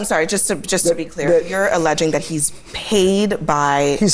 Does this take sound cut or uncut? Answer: uncut